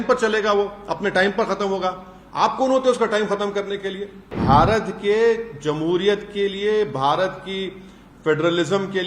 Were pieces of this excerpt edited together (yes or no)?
yes